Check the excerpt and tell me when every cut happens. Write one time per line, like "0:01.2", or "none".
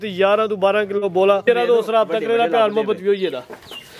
0:01.5